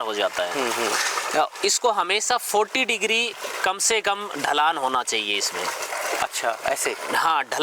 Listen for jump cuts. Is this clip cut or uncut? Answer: uncut